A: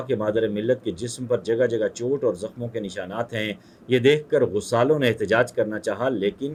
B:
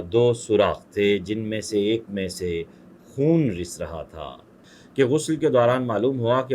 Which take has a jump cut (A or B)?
B